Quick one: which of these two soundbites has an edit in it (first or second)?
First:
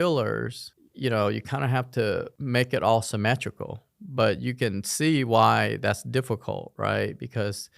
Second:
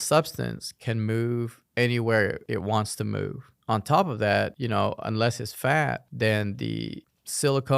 second